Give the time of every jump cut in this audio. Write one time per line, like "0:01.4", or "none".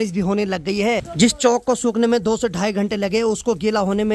0:01.1